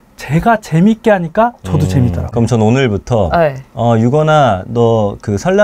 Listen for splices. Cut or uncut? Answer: cut